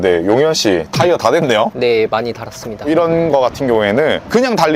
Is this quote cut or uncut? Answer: cut